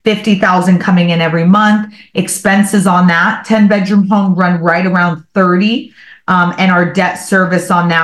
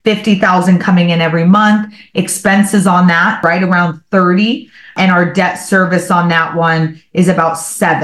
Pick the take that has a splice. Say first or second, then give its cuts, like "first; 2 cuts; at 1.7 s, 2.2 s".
second; 2 cuts; at 3.4 s, 4.9 s